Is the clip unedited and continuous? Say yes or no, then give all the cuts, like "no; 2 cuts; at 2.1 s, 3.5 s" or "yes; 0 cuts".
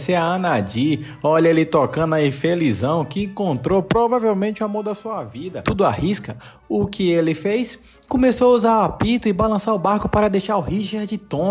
no; 1 cut; at 5.6 s